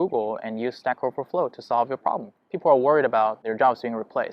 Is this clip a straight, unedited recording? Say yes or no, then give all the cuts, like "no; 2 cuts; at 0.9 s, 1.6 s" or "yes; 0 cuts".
no; 1 cut; at 2.3 s